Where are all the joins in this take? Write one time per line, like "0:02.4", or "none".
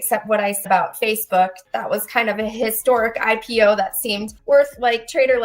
0:04.3